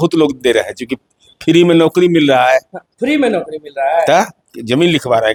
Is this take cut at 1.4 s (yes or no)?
no